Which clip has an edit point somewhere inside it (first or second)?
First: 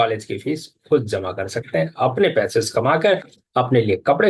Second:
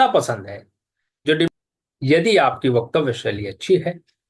second